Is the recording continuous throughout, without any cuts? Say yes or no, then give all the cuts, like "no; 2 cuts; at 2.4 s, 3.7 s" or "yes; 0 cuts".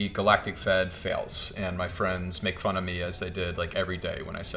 yes; 0 cuts